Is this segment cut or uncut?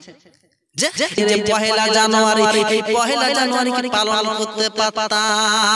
cut